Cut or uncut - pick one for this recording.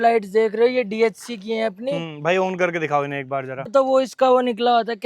cut